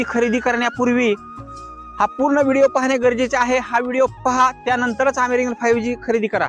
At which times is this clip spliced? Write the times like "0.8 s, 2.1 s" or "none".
none